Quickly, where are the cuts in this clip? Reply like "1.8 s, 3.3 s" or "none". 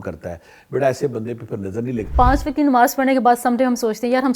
2.1 s